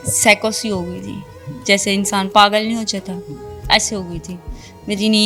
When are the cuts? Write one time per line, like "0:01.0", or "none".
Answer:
none